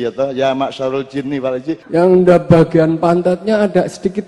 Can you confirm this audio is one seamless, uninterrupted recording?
no; 1 cut; at 1.8 s

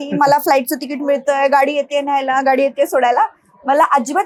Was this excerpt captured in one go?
yes; 0 cuts

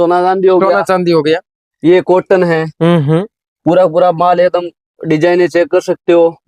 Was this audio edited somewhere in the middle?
no; 0 cuts

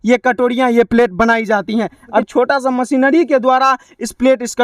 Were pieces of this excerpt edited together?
yes; 1 cut; at 2.2 s

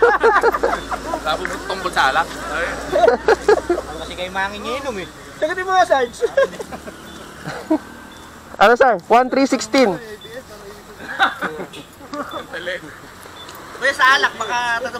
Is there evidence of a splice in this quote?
no; 0 cuts

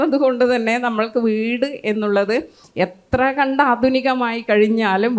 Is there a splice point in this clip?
no; 0 cuts

